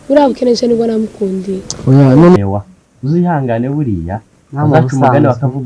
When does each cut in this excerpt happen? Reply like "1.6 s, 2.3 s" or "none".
2.4 s